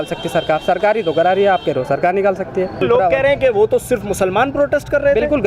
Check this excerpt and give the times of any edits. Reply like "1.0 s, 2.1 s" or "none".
2.8 s